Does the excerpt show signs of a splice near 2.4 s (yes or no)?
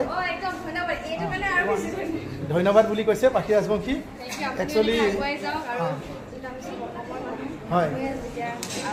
no